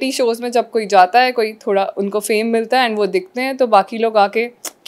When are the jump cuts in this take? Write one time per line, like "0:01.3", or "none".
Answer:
none